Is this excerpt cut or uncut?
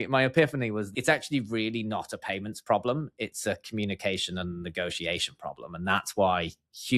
cut